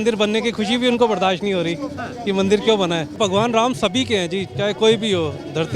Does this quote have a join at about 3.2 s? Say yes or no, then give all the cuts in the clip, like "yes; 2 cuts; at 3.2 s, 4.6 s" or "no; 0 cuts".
yes; 1 cut; at 3.2 s